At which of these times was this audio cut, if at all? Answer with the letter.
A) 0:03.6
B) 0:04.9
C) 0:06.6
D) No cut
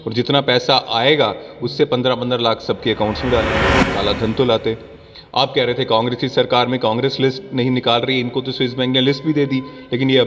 A